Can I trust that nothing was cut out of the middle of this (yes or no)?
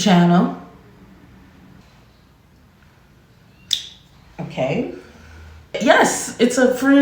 no